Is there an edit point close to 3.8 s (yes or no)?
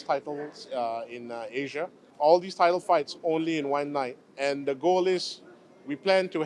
no